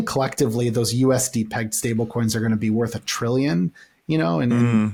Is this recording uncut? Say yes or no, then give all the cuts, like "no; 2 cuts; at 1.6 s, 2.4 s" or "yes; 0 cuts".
yes; 0 cuts